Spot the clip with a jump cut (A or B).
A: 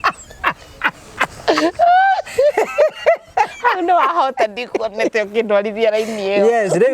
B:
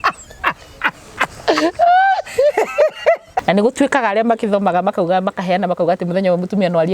B